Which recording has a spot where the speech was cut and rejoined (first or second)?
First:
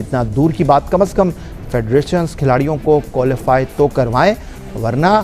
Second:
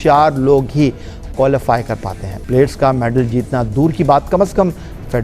second